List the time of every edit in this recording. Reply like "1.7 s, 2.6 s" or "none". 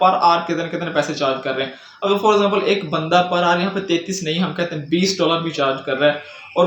none